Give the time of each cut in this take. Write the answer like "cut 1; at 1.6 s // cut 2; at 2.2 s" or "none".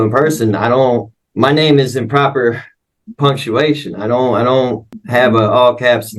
cut 1; at 1.2 s // cut 2; at 5.0 s